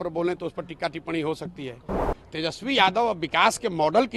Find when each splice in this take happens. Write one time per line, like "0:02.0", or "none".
0:02.0